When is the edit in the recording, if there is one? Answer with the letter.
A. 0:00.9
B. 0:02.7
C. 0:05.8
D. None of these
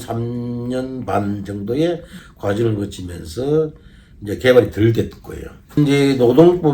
C